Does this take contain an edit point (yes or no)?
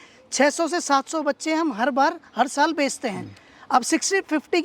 no